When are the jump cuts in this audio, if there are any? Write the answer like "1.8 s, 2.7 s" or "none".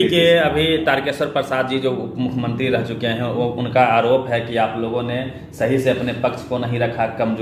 none